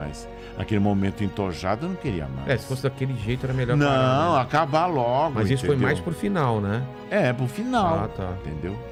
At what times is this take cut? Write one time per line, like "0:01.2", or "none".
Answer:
none